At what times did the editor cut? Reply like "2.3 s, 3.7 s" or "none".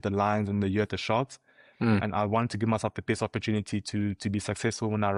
none

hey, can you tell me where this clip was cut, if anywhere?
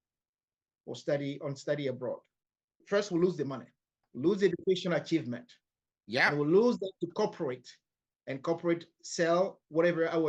2.8 s, 4.1 s

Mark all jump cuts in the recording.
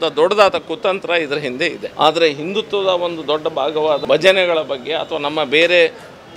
1.8 s, 4.0 s

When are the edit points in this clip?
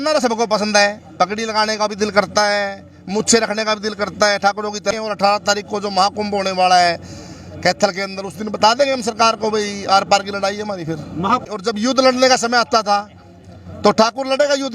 4.9 s, 11.5 s

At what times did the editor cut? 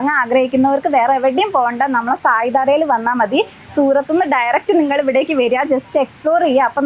none

